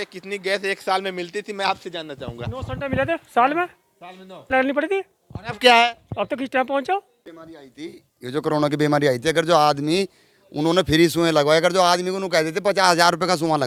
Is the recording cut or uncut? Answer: uncut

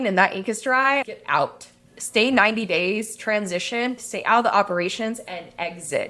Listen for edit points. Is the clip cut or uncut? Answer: cut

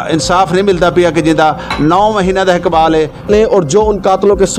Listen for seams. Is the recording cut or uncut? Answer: cut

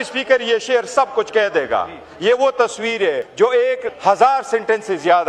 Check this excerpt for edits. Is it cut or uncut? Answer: cut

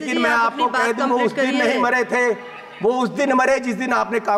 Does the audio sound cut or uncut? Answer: uncut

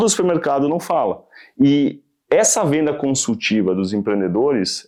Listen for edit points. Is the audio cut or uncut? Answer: uncut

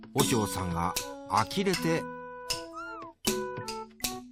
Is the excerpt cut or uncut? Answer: uncut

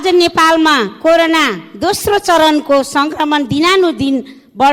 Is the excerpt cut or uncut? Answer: uncut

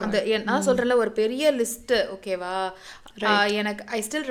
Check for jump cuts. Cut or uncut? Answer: uncut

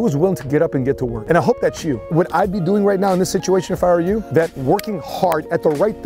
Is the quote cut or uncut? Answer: cut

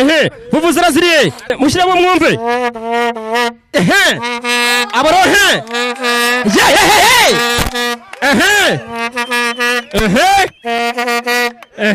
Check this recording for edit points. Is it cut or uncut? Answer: cut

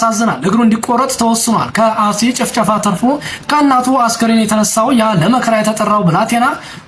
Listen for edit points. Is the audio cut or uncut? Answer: uncut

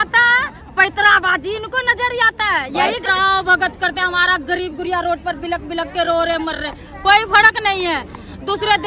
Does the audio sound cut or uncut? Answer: cut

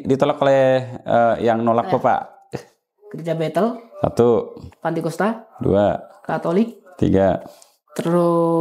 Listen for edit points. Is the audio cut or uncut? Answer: uncut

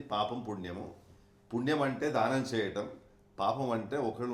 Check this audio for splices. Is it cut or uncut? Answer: uncut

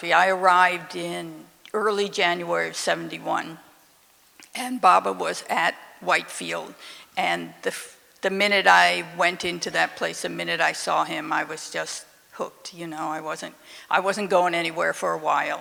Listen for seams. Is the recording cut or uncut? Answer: uncut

